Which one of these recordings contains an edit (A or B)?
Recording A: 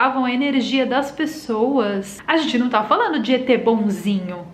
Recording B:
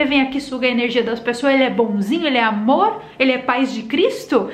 A